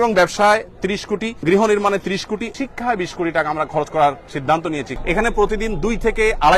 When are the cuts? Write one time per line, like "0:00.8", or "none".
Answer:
0:01.4
0:02.5
0:04.9